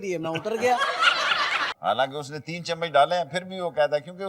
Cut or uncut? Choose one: cut